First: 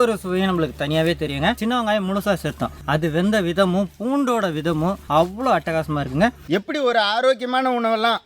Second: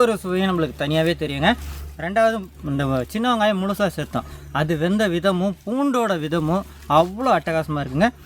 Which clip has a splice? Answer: first; 3 cuts; at 1.6 s, 2.7 s, 5.0 s

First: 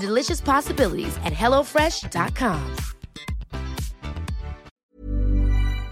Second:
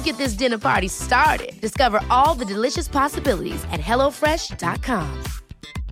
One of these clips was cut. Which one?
first; 1 cut; at 4.7 s

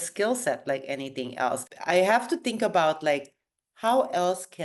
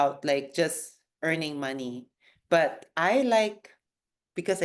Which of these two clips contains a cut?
first; 1 cut; at 1.7 s

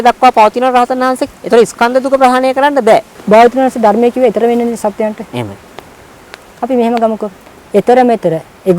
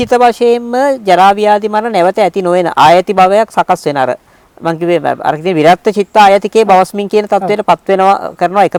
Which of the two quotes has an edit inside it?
first; 1 cut; at 3.1 s

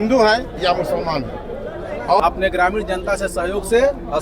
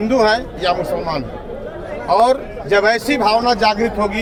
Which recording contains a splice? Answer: first; 1 cut; at 2.2 s

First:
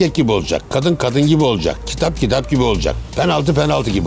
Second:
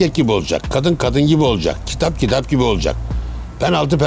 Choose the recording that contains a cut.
first; 1 cut; at 3.0 s

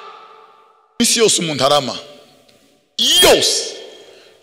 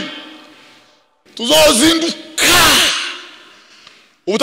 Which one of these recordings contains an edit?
first; 1 cut; at 1.0 s

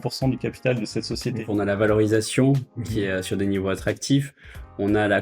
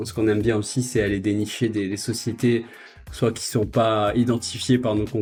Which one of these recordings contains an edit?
first; 1 cut; at 1.4 s

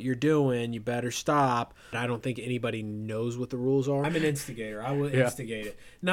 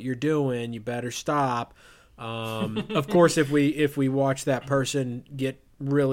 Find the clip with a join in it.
first; 2 cuts; at 2.0 s, 4.0 s

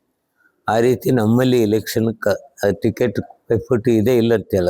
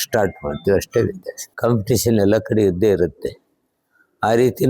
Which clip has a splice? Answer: second; 1 cut; at 1.5 s

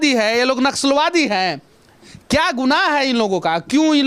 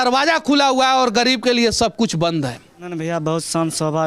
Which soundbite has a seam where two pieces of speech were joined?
second; 1 cut; at 3.0 s

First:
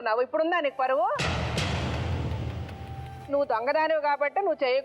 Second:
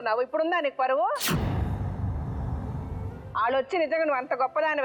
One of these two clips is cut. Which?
first; 2 cuts; at 1.3 s, 3.3 s

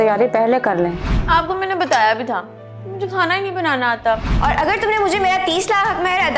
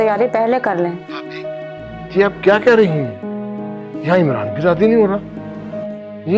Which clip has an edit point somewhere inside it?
first; 2 cuts; at 1.1 s, 4.3 s

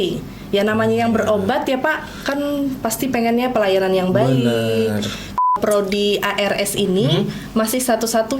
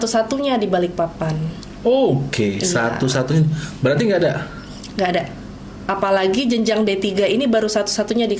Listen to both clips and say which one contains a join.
first; 1 cut; at 5.5 s

